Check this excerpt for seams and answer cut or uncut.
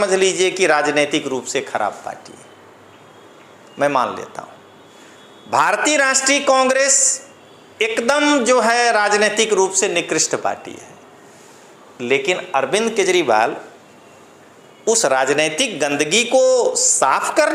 uncut